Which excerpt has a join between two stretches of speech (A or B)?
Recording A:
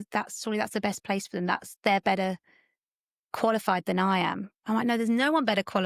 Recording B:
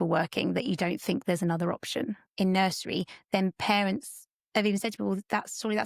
B